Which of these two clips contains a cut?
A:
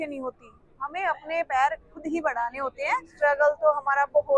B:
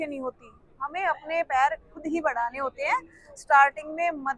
A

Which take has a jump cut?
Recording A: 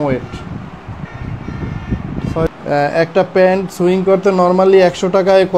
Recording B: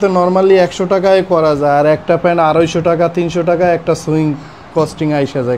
A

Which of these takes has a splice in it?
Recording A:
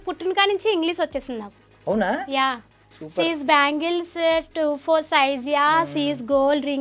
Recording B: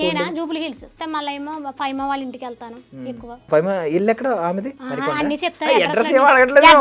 B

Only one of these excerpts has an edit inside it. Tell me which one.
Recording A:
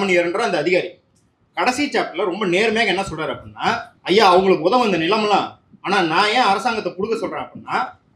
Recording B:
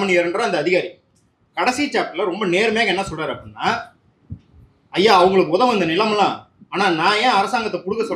A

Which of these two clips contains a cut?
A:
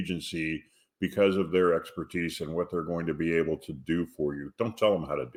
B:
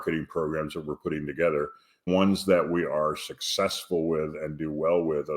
B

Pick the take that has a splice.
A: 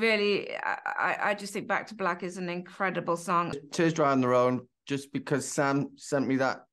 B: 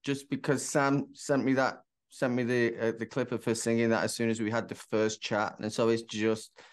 A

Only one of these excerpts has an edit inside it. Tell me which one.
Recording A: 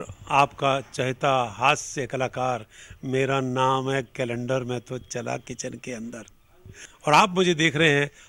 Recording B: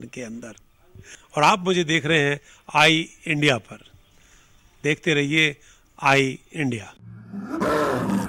B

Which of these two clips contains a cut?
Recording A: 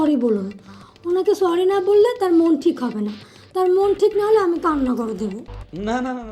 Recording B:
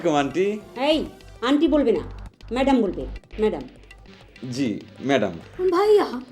B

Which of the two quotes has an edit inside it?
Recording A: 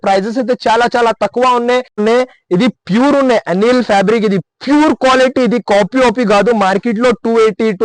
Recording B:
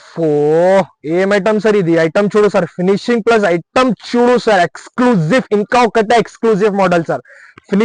A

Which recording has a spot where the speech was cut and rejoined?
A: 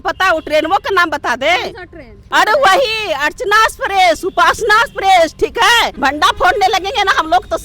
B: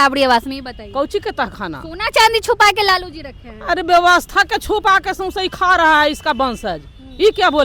A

